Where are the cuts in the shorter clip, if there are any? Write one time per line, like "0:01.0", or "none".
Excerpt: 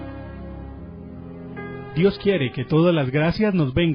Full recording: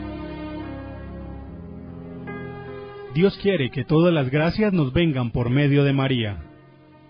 0:01.9